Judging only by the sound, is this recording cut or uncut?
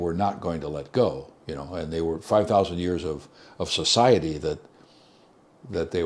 uncut